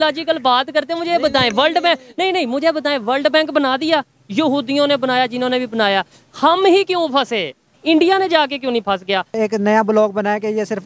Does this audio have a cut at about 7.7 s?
yes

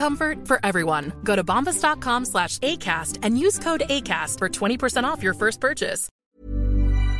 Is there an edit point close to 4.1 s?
no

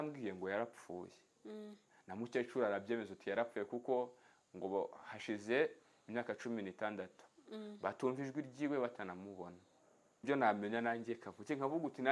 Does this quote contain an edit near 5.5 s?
no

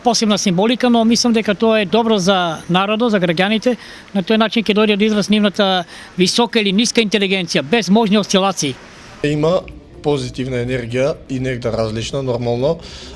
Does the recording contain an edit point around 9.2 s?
yes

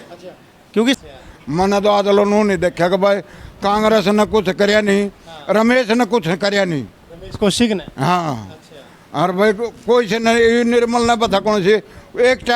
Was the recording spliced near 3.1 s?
no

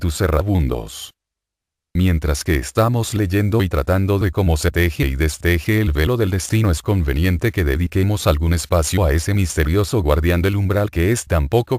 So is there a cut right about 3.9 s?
no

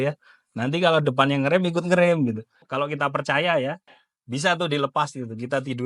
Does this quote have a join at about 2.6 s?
yes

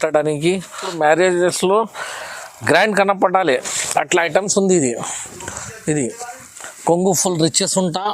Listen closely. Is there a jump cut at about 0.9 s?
yes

